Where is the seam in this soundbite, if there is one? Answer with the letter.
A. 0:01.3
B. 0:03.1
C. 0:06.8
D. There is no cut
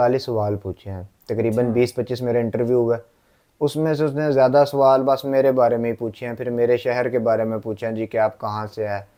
D